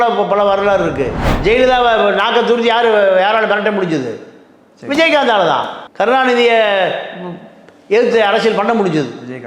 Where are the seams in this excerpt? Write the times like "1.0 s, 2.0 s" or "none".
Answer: 1.2 s